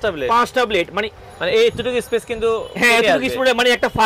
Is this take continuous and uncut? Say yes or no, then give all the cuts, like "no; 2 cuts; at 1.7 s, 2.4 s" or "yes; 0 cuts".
no; 1 cut; at 1.1 s